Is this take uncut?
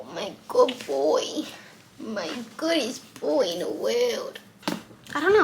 no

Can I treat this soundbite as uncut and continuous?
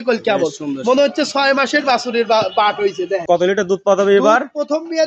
no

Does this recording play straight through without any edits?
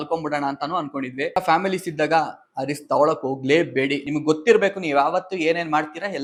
yes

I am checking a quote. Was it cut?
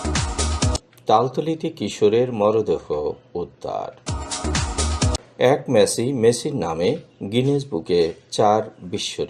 no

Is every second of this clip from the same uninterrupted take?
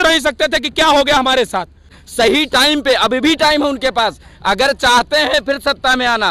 no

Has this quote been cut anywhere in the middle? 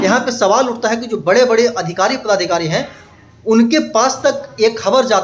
no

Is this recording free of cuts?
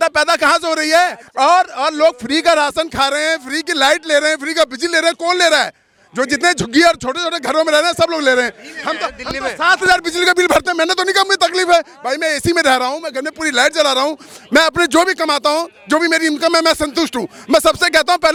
yes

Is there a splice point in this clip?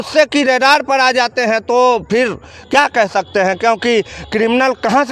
no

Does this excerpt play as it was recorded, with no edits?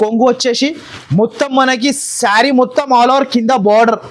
yes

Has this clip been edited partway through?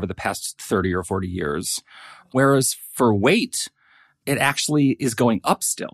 no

